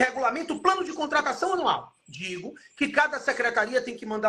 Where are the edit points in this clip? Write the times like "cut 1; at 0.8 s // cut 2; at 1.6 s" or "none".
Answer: none